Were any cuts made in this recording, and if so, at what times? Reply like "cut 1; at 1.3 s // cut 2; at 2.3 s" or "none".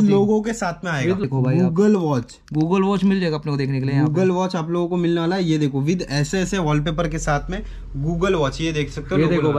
cut 1; at 1.2 s